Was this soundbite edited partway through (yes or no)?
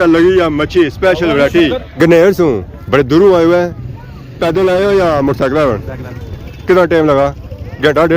yes